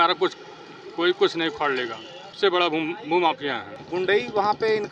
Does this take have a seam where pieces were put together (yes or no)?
yes